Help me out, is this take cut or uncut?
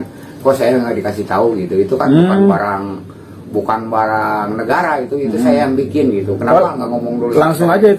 uncut